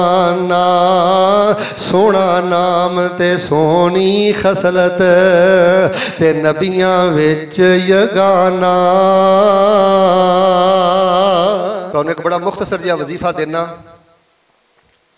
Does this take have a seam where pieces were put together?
yes; 1 cut; at 11.8 s

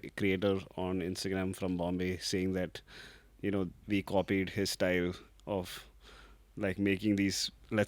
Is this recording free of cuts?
yes; 0 cuts

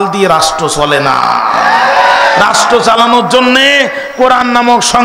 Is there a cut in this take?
no; 0 cuts

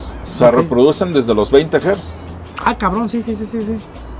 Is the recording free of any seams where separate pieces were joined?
yes; 0 cuts

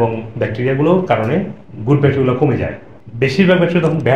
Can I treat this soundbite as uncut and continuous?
yes; 0 cuts

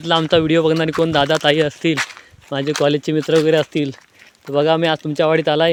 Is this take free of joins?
yes; 0 cuts

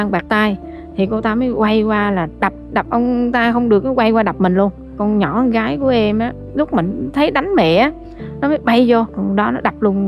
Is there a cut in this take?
yes; 3 cuts; at 4.9 s, 6.4 s, 9.1 s

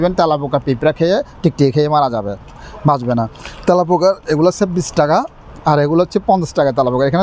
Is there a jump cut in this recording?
no; 0 cuts

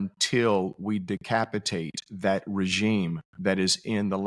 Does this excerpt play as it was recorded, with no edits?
yes; 0 cuts

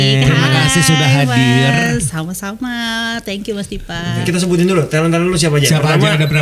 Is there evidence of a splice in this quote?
yes; 1 cut; at 4.2 s

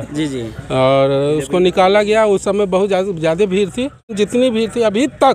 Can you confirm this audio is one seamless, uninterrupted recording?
no; 1 cut; at 4.1 s

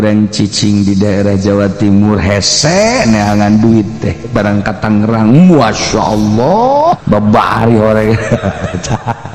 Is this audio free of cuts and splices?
no; 1 cut; at 7.0 s

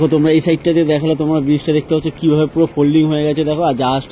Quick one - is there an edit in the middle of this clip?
no; 0 cuts

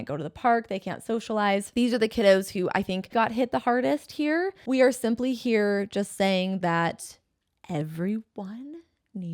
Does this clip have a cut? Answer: yes; 3 cuts; at 1.7 s, 3.1 s, 4.6 s

